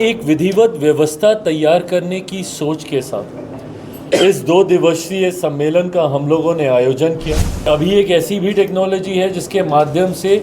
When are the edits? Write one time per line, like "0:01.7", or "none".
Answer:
0:07.7